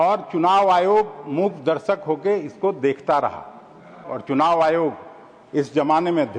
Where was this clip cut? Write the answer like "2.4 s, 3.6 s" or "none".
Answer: 4.1 s